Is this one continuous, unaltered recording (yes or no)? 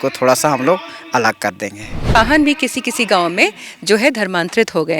no